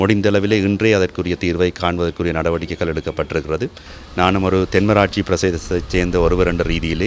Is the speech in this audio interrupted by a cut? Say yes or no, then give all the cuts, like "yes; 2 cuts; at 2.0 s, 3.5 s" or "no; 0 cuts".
yes; 1 cut; at 3.9 s